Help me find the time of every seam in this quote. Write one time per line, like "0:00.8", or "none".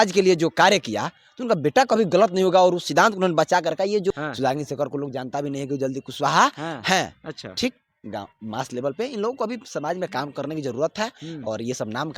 0:04.1